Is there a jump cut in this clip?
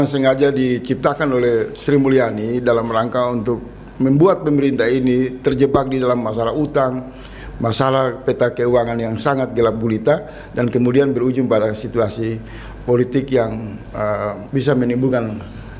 no; 0 cuts

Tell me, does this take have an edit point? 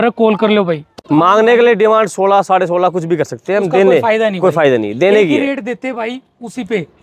yes; 1 cut; at 1.0 s

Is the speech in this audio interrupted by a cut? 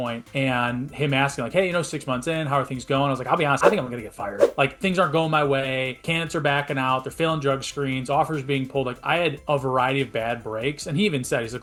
no; 0 cuts

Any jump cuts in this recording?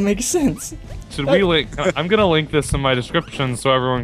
yes; 1 cut; at 1.4 s

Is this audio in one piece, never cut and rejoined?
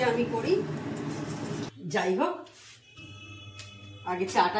no; 1 cut; at 1.7 s

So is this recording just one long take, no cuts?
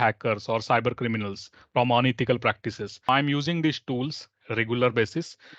no; 1 cut; at 3.1 s

